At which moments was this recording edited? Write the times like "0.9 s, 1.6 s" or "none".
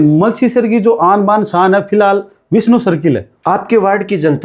3.3 s